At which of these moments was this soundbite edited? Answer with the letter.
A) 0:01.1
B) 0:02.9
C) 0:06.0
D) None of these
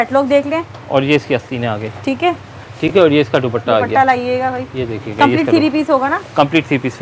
D